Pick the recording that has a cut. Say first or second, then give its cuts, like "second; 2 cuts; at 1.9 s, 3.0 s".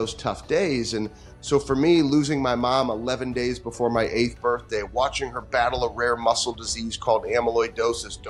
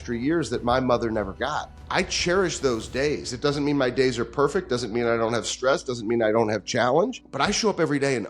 second; 2 cuts; at 1.7 s, 7.2 s